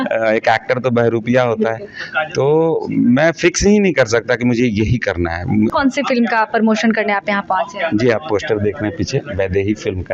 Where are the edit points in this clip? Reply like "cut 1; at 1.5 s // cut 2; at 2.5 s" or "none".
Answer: cut 1; at 5.7 s